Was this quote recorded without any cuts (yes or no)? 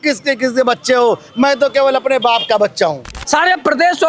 no